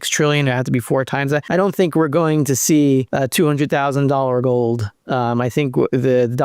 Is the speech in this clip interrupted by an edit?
yes; 2 cuts; at 1.5 s, 3.1 s

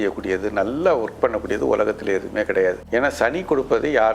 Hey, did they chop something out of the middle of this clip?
yes; 1 cut; at 2.8 s

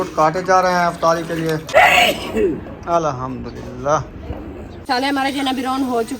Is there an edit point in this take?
yes; 2 cuts; at 1.7 s, 4.9 s

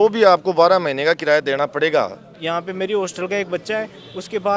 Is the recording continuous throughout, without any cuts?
no; 1 cut; at 2.3 s

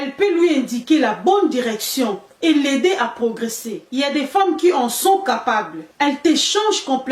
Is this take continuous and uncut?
yes; 0 cuts

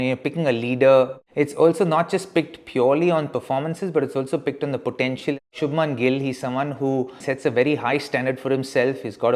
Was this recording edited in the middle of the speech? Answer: yes; 3 cuts; at 1.2 s, 5.5 s, 7.2 s

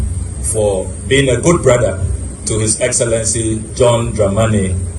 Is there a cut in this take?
no; 0 cuts

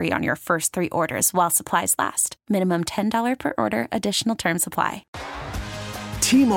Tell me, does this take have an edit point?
yes; 1 cut; at 5.0 s

